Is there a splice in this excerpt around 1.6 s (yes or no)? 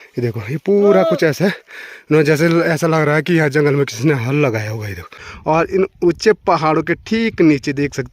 no